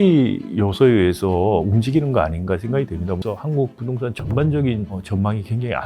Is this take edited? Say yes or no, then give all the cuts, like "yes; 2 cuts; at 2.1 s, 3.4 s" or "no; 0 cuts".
yes; 1 cut; at 3.2 s